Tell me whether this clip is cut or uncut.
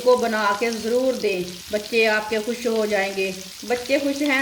cut